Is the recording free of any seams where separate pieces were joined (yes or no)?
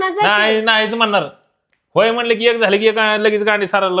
yes